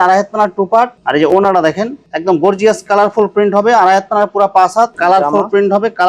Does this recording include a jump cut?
yes; 2 cuts; at 1.0 s, 4.9 s

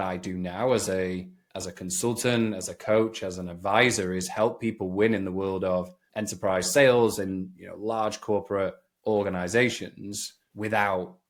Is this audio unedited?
yes; 0 cuts

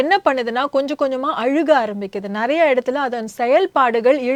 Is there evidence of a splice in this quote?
no; 0 cuts

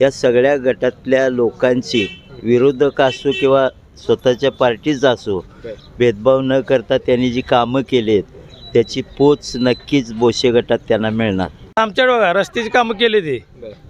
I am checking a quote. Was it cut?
yes; 1 cut; at 11.8 s

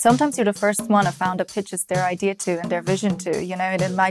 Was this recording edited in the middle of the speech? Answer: no; 0 cuts

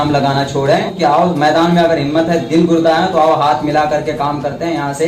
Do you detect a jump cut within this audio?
yes; 1 cut; at 0.9 s

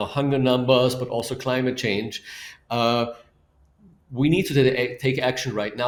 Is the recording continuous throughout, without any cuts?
yes; 0 cuts

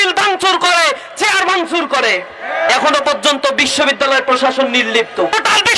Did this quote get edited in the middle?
yes; 1 cut; at 2.7 s

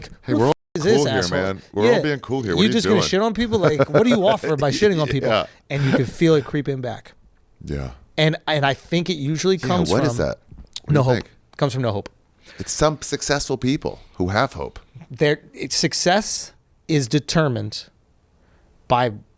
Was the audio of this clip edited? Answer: no; 0 cuts

